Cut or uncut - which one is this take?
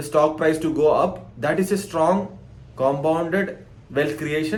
uncut